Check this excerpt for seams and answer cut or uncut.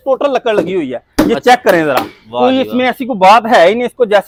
uncut